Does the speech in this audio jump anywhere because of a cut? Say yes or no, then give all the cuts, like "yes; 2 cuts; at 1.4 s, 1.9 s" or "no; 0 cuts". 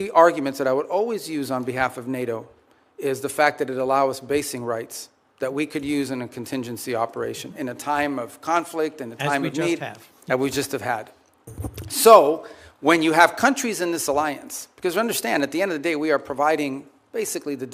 no; 0 cuts